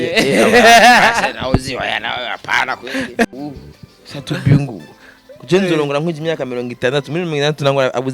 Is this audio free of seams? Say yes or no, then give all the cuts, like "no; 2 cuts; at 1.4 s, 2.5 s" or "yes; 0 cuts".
no; 1 cut; at 3.3 s